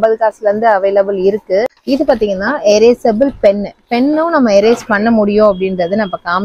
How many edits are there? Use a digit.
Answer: 1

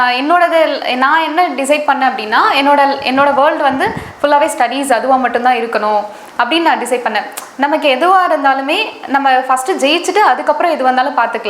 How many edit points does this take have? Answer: 0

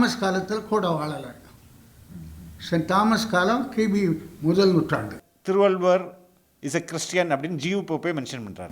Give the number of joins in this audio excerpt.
1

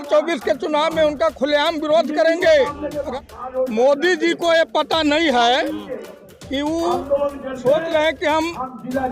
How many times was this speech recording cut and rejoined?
1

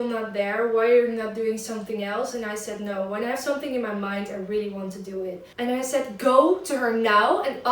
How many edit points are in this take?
1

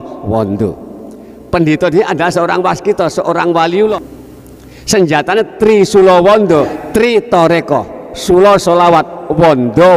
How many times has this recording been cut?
2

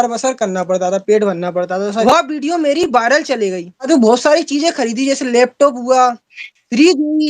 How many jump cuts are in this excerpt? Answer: 2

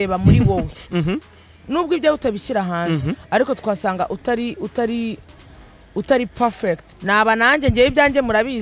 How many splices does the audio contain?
1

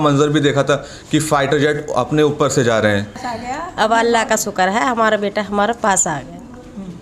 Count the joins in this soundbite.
1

